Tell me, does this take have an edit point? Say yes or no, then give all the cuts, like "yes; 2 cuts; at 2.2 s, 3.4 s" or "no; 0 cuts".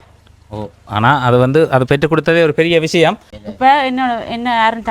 yes; 1 cut; at 3.3 s